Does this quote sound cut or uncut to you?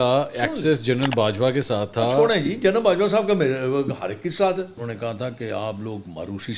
cut